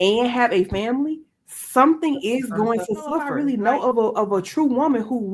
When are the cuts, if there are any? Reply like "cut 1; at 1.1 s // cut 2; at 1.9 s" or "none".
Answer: cut 1; at 3.3 s